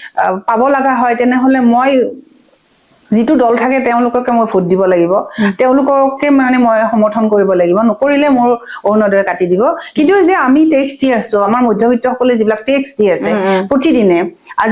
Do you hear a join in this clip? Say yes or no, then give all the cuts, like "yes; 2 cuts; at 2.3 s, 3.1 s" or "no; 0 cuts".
no; 0 cuts